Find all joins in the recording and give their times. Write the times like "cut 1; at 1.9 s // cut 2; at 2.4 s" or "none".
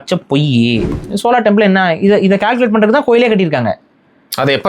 cut 1; at 1.0 s